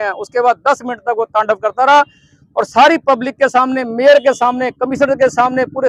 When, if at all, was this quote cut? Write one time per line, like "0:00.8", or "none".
none